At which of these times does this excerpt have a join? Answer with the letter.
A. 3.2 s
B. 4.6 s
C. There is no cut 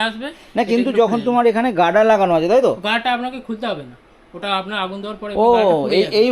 C